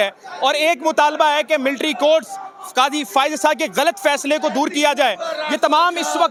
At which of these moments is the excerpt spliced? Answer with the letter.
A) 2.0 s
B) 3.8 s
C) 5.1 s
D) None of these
D